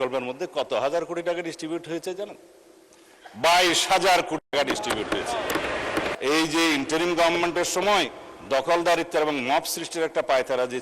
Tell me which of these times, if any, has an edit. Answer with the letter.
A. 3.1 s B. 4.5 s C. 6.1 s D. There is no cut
C